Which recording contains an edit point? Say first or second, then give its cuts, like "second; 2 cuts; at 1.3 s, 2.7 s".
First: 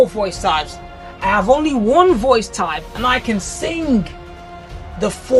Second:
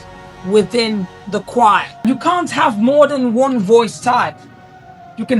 second; 1 cut; at 1.9 s